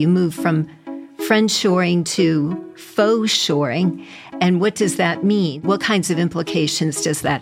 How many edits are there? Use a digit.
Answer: 1